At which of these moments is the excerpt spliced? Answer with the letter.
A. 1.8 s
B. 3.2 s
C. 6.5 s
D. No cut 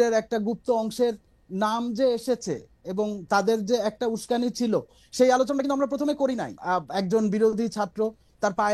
C